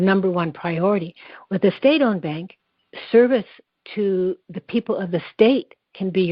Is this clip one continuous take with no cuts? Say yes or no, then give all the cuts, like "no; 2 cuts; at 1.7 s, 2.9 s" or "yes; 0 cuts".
yes; 0 cuts